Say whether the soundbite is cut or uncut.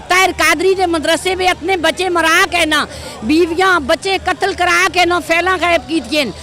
uncut